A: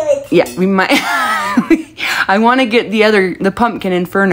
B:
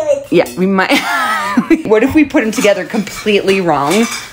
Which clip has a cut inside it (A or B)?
B